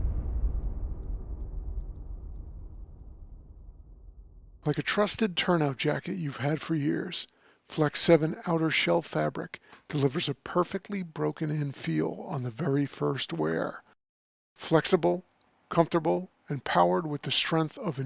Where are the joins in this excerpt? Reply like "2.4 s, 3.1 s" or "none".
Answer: 4.5 s

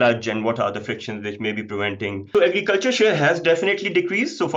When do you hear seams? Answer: 2.2 s

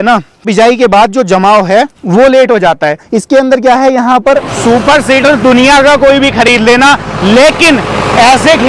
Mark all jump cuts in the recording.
4.5 s

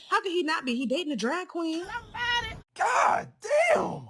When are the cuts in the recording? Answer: none

